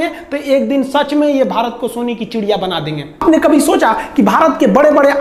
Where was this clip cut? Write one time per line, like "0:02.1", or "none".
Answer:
none

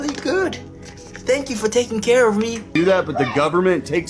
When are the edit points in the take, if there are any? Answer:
0:02.6

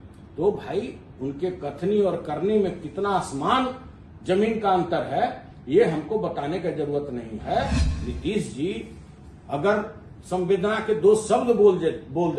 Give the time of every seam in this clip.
0:07.8

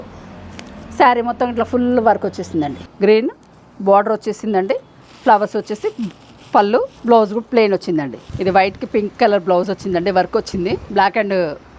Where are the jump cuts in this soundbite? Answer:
0:02.8
0:07.0
0:08.2
0:10.9

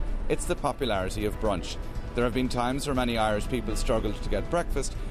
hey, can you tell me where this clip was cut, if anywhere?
none

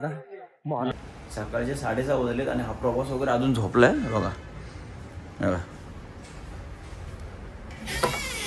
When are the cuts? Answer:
0:00.9

